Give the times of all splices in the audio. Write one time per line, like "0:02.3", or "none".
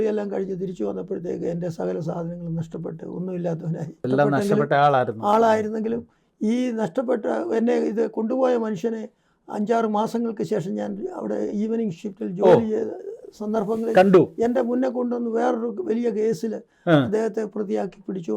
0:04.1